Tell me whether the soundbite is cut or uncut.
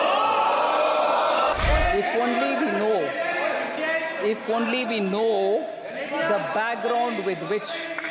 cut